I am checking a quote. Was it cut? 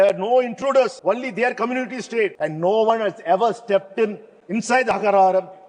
yes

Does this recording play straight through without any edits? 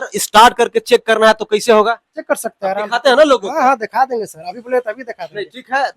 yes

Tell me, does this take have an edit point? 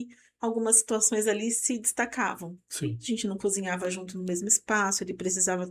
no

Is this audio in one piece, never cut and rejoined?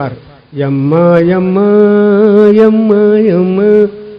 yes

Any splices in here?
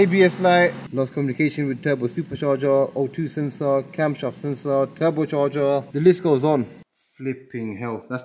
yes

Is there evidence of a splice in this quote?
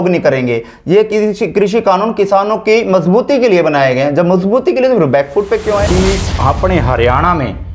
yes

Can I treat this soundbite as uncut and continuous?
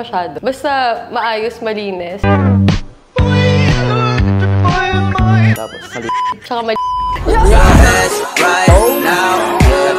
yes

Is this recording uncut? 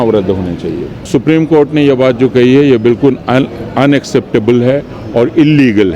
no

